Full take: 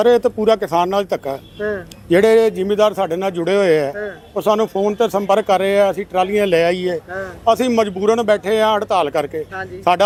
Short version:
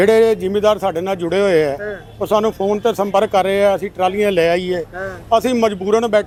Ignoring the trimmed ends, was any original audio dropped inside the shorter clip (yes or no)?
no